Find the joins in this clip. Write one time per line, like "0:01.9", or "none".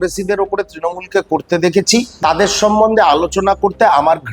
0:02.1